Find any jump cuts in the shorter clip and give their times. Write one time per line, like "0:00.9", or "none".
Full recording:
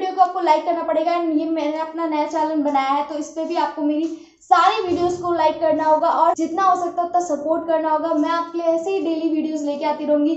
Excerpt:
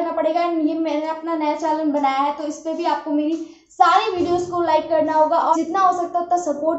0:05.5